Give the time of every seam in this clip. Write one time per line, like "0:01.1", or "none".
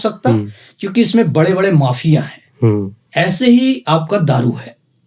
none